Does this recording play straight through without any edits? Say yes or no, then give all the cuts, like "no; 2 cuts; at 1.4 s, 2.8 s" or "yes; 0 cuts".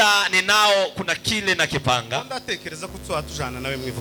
yes; 0 cuts